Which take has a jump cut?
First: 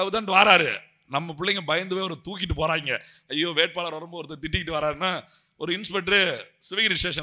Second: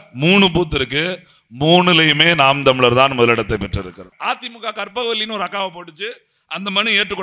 second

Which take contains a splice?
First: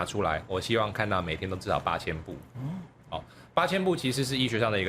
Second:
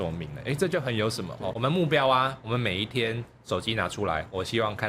second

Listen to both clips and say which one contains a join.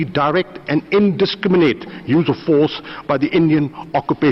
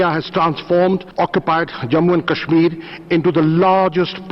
second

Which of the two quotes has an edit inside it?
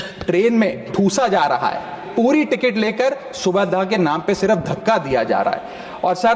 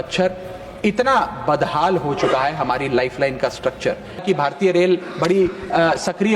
second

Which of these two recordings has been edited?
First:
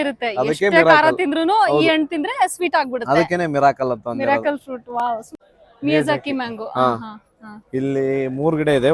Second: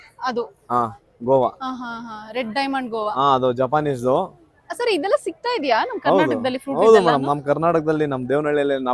first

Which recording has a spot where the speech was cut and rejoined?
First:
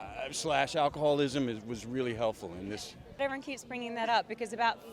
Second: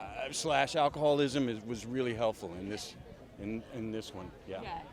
first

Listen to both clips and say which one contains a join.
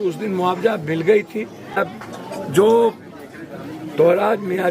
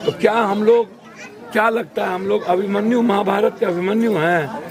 first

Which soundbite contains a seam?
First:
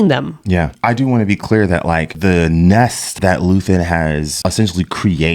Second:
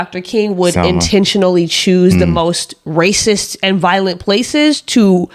first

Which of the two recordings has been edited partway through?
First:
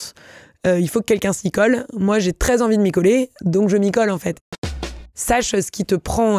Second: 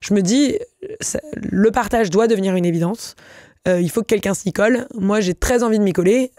first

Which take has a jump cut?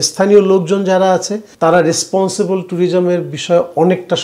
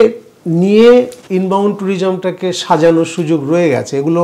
first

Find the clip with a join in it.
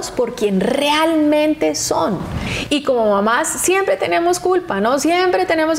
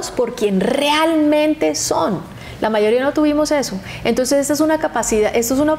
first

